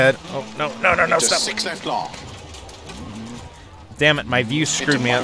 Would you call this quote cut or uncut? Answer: uncut